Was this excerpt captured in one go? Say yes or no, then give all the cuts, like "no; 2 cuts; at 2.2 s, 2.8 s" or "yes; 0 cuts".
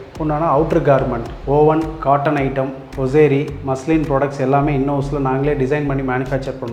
yes; 0 cuts